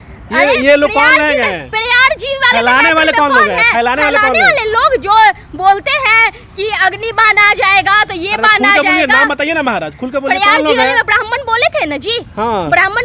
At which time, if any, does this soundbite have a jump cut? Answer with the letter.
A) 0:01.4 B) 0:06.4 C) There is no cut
C